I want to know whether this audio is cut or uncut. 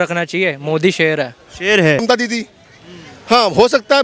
cut